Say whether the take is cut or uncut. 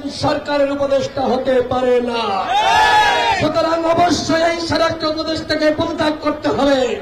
uncut